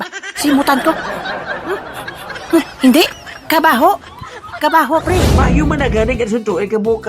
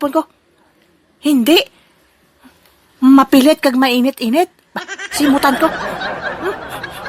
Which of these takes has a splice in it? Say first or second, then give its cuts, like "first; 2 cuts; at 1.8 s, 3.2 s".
first; 1 cut; at 5.3 s